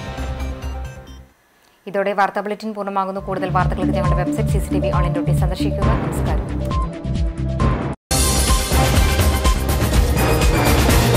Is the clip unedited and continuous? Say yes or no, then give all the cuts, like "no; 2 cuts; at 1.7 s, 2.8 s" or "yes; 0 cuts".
yes; 0 cuts